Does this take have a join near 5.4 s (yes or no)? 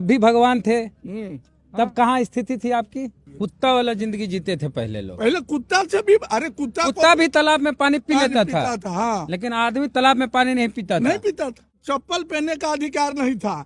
no